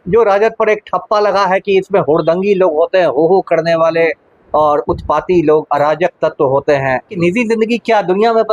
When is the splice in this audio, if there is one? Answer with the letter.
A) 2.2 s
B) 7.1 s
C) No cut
B